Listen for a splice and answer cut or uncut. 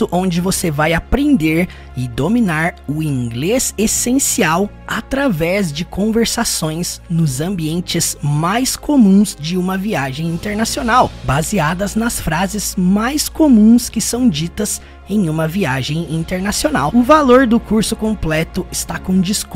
cut